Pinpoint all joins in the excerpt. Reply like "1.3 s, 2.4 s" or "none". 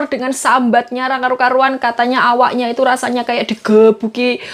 none

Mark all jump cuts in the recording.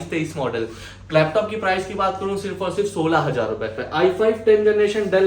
3.8 s

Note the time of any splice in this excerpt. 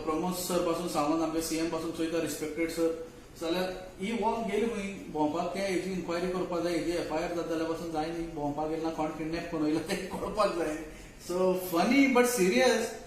none

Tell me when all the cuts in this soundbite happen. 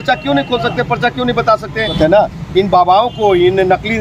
1.9 s

